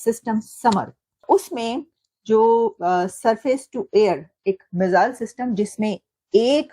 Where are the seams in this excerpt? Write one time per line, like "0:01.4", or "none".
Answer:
0:01.2